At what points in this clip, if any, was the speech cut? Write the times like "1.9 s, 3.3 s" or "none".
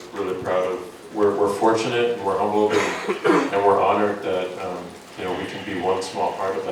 1.0 s